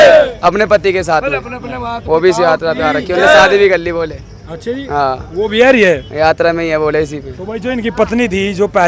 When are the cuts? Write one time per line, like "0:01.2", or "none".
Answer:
none